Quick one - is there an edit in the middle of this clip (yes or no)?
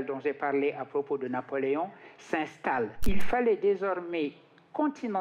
yes